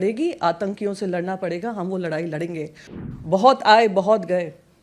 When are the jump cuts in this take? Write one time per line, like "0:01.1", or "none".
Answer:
0:02.8

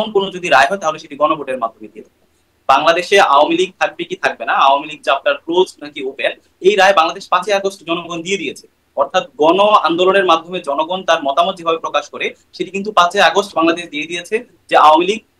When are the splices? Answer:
none

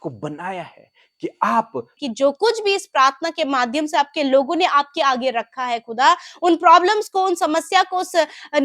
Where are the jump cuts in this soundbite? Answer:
0:02.0

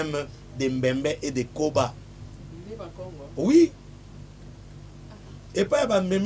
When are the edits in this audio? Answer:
none

